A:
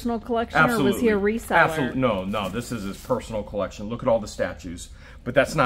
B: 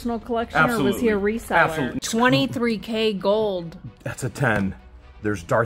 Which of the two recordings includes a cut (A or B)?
B